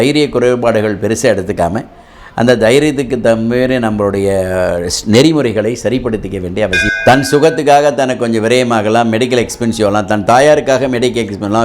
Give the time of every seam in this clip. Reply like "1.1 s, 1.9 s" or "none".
6.8 s

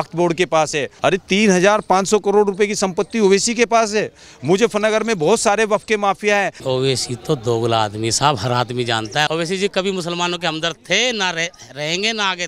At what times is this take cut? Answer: 0.9 s, 6.6 s, 9.3 s

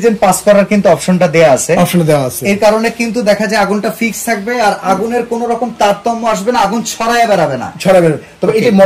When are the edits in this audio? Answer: none

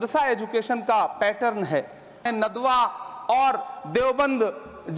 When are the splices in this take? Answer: 2.3 s

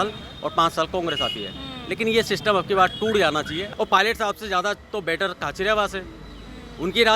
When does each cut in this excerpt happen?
3.7 s

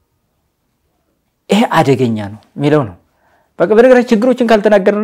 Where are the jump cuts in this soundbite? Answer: none

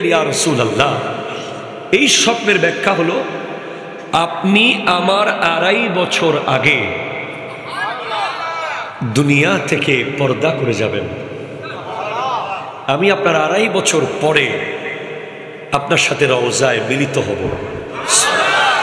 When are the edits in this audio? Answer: none

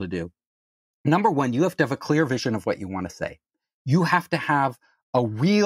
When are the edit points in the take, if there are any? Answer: none

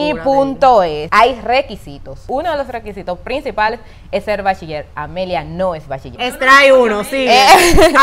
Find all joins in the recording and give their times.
1.0 s, 2.2 s, 6.1 s

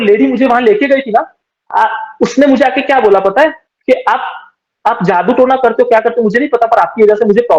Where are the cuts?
3.7 s

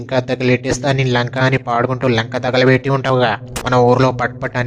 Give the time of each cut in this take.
3.5 s

